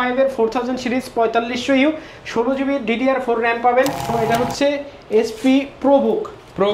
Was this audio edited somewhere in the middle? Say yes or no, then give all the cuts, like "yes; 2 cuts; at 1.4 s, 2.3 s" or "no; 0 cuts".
yes; 1 cut; at 4.1 s